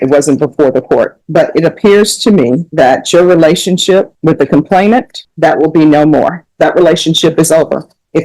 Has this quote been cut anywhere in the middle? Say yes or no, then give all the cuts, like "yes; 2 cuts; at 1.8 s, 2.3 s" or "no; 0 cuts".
yes; 5 cuts; at 1.2 s, 2.7 s, 4.1 s, 5.2 s, 6.4 s